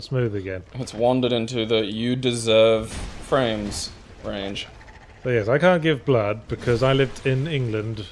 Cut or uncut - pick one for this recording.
cut